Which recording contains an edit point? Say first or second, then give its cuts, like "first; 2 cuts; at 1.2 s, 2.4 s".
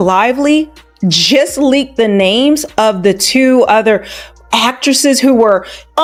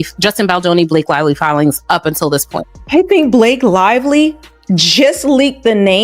second; 1 cut; at 2.8 s